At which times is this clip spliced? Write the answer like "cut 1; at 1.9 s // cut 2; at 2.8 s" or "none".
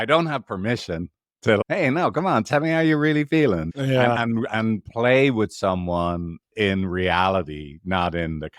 none